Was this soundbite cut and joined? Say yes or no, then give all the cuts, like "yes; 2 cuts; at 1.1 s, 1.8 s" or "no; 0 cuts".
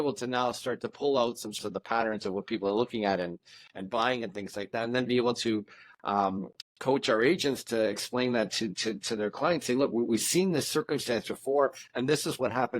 yes; 1 cut; at 1.6 s